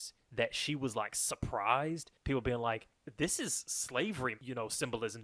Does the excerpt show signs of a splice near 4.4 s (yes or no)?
yes